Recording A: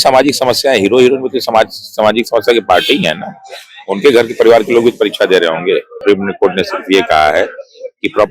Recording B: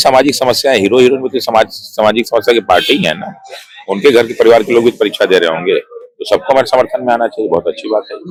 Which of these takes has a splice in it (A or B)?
A